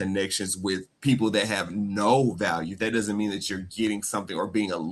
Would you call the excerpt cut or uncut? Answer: uncut